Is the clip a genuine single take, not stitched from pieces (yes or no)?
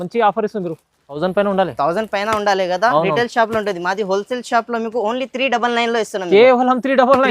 no